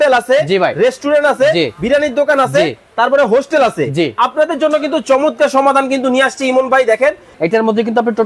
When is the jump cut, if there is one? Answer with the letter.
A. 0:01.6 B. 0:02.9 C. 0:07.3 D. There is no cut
C